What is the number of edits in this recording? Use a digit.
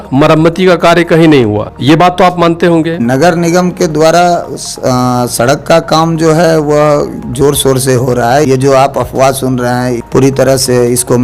4